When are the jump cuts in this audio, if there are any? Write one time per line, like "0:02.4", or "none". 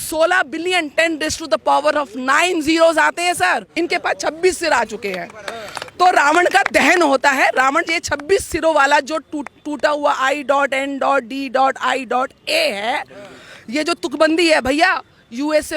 0:03.7